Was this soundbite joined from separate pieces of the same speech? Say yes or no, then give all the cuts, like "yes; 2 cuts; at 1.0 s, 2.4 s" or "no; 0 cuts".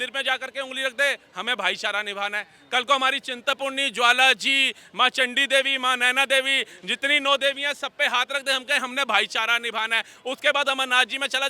no; 0 cuts